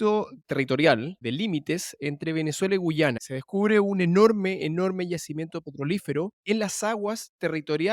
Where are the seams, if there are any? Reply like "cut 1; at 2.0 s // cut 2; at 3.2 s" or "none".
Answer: cut 1; at 1.2 s // cut 2; at 3.2 s // cut 3; at 6.4 s